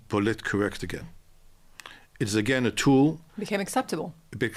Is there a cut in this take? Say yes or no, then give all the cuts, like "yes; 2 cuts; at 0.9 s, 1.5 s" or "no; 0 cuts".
no; 0 cuts